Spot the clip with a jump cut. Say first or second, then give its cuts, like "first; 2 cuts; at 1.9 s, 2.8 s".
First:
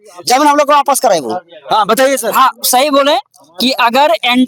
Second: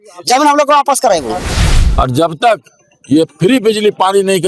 second; 1 cut; at 1.6 s